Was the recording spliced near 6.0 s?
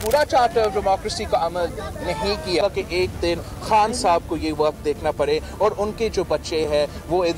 no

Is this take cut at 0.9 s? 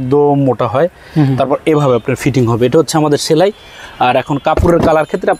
no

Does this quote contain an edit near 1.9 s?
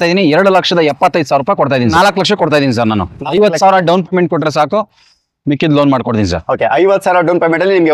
yes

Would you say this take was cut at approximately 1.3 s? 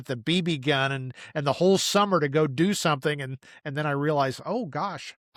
no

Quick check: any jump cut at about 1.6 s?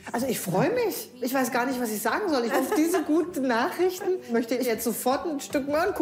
no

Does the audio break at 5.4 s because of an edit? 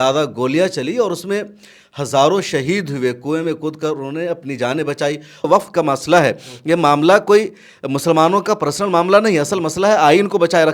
yes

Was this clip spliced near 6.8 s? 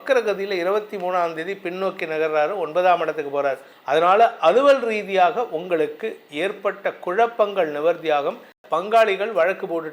no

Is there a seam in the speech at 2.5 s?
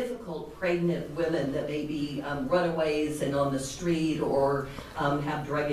no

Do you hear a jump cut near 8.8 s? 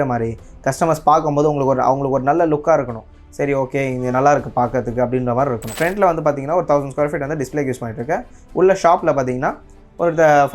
no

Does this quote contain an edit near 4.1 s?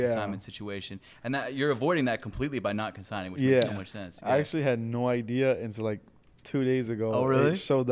no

